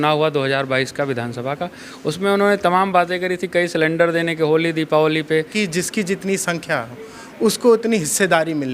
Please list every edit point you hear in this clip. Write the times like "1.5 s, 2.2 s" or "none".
5.5 s